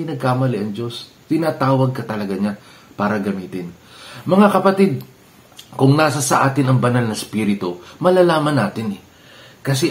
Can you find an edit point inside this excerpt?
no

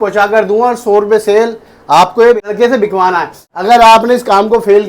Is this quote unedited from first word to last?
no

